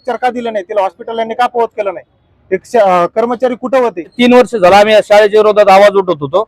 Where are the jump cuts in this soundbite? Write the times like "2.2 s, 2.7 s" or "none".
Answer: 4.1 s